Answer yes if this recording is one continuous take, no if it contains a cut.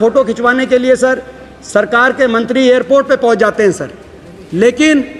yes